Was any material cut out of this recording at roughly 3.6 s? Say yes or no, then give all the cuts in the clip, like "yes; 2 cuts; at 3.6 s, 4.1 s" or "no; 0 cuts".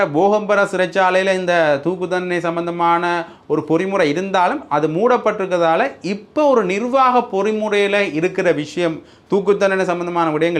no; 0 cuts